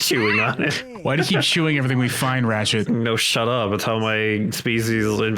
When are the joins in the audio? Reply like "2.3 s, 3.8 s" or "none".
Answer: 0.9 s, 2.8 s